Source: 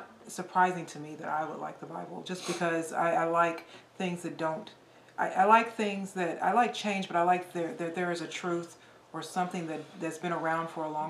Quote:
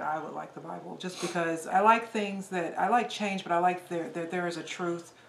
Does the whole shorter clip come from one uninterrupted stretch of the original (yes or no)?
no